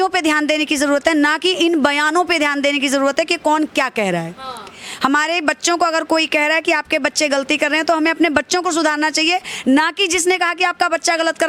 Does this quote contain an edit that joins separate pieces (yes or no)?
no